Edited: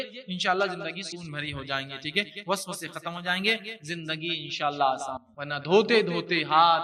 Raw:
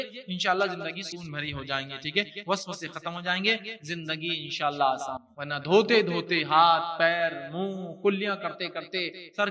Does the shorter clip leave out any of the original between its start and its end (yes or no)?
no